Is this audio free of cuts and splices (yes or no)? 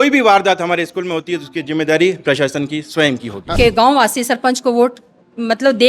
no